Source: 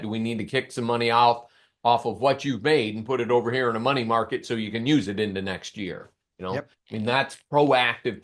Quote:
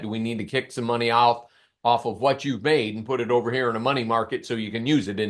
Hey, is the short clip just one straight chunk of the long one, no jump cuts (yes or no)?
yes